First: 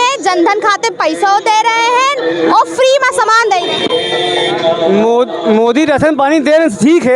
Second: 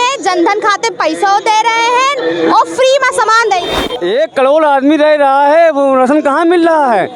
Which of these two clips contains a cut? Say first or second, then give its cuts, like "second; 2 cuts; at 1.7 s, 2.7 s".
second; 1 cut; at 3.9 s